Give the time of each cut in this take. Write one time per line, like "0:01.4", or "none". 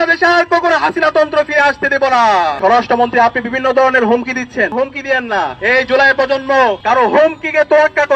0:02.6
0:05.6
0:06.8